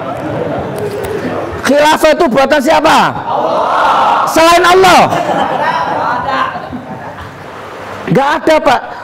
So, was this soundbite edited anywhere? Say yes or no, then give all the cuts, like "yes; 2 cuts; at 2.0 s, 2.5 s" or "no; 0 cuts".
yes; 1 cut; at 7.4 s